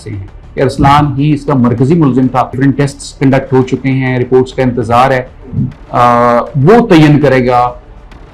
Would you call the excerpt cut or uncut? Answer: cut